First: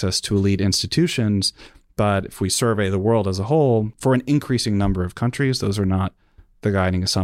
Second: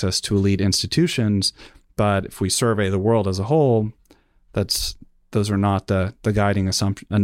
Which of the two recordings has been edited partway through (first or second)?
first